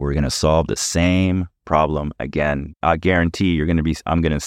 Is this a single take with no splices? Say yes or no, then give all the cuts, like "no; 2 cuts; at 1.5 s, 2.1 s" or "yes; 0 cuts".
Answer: no; 1 cut; at 2.8 s